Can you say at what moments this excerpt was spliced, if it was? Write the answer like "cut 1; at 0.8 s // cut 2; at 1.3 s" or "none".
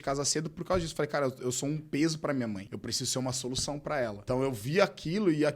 cut 1; at 2.7 s // cut 2; at 4.2 s